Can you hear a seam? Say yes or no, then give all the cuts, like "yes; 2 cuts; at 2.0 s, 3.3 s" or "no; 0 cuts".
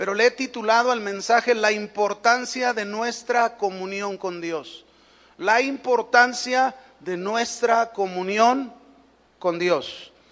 yes; 1 cut; at 1.9 s